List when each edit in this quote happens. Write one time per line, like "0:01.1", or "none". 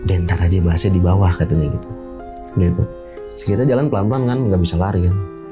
none